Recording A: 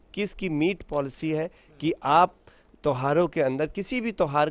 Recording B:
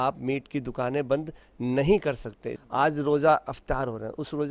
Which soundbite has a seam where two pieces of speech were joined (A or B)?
B